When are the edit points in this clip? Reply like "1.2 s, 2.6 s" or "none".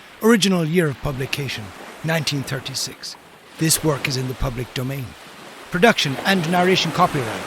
none